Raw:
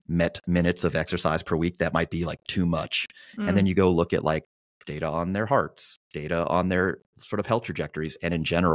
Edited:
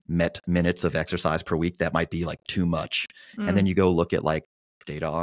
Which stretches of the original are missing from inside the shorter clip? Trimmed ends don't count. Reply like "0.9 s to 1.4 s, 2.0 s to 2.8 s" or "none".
none